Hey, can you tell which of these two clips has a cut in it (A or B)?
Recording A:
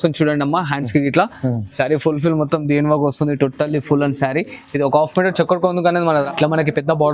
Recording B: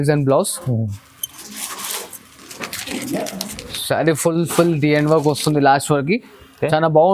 A